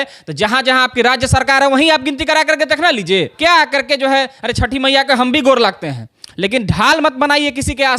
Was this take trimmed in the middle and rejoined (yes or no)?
yes